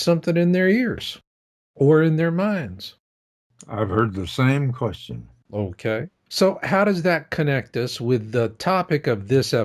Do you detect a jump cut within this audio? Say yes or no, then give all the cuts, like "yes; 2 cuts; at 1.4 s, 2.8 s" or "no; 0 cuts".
yes; 1 cut; at 7.7 s